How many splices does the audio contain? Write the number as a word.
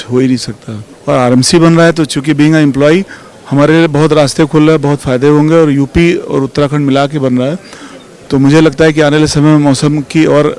zero